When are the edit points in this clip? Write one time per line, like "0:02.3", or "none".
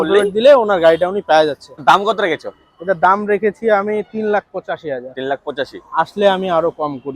0:01.8